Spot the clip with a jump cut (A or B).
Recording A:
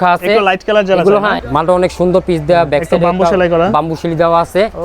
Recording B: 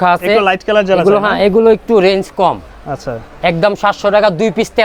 A